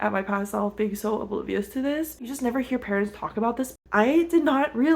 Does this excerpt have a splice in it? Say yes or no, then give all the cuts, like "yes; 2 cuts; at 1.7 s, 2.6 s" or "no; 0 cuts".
yes; 2 cuts; at 2.3 s, 3.7 s